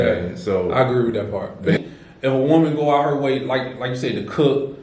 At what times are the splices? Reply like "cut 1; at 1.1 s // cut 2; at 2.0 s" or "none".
cut 1; at 1.8 s